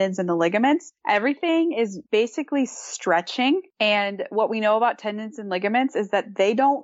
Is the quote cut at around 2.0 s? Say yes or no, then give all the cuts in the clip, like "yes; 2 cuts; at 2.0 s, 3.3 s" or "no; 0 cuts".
yes; 3 cuts; at 0.9 s, 2.0 s, 3.7 s